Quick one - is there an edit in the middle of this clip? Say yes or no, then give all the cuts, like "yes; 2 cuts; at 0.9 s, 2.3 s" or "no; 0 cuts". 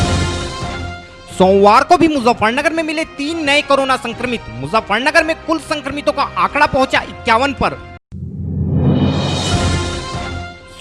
yes; 1 cut; at 0.9 s